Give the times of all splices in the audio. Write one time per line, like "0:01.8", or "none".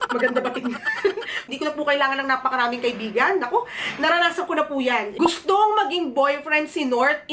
0:01.5
0:05.1